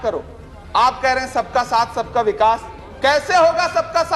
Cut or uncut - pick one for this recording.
uncut